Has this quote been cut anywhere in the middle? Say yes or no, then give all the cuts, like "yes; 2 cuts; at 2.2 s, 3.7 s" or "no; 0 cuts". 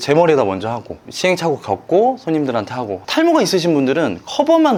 no; 0 cuts